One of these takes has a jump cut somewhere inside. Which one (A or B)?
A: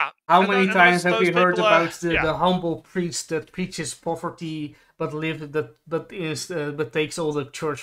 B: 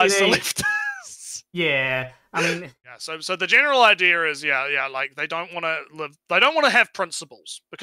B